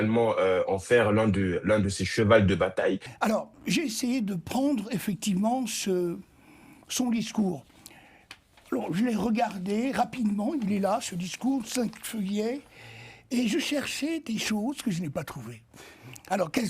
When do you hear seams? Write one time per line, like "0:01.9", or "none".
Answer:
0:03.1